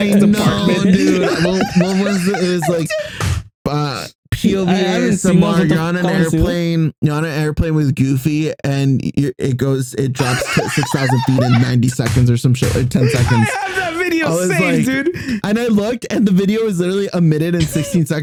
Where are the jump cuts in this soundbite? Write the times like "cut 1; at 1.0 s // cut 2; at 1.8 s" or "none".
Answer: none